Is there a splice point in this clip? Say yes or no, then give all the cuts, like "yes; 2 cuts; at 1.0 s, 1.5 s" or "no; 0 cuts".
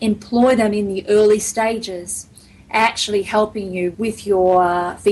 yes; 1 cut; at 3.9 s